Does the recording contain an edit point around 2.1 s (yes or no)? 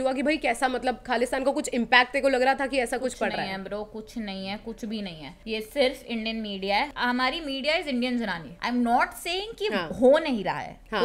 no